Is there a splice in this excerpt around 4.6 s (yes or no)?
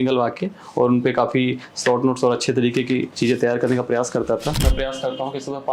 yes